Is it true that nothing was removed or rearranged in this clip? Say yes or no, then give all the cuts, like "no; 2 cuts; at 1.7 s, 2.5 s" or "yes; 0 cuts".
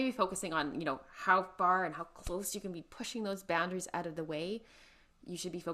yes; 0 cuts